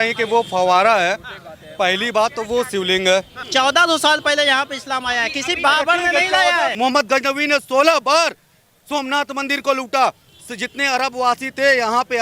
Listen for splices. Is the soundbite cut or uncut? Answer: cut